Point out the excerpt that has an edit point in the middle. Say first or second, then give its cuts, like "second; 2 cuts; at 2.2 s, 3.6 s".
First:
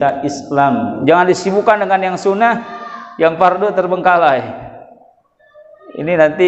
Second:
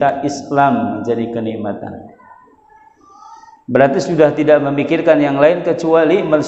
first; 1 cut; at 0.9 s